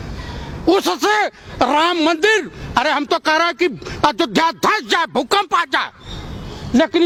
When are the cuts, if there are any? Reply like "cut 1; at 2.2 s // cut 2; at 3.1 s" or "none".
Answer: none